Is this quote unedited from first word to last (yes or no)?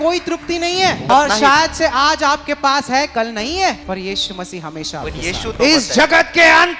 no